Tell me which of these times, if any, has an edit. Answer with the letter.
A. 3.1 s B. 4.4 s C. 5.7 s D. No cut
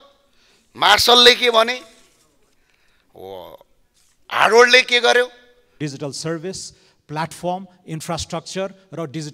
C